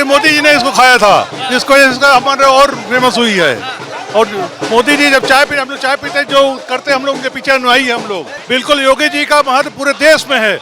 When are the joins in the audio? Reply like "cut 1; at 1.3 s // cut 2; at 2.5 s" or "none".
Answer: cut 1; at 8.3 s